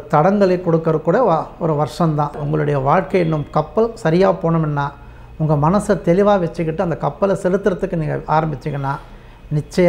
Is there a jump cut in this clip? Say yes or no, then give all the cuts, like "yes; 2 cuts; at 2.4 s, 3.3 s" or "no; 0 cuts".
yes; 1 cut; at 2.4 s